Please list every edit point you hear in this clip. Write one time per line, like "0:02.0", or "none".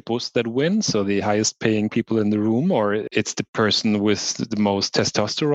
0:03.0